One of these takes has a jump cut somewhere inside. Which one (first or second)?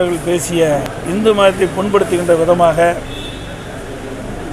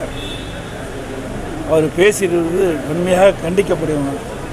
first